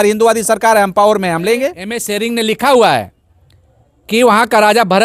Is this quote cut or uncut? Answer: cut